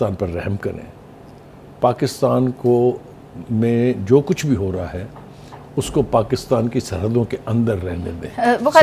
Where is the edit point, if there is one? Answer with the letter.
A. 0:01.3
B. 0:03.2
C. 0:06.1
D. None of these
D